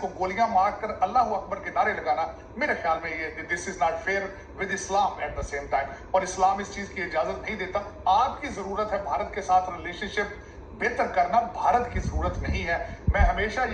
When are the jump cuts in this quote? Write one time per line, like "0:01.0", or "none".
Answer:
0:07.9